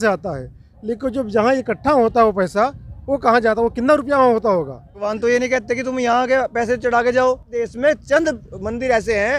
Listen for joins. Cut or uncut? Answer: cut